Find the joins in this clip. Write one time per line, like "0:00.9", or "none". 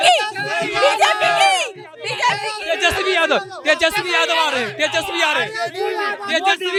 none